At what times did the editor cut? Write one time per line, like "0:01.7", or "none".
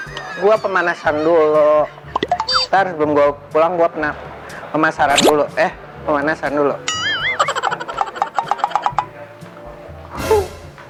none